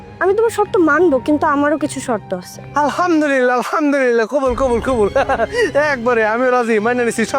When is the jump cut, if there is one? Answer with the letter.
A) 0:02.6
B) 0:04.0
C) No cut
A